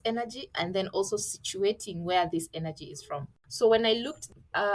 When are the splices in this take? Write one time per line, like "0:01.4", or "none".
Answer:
0:03.3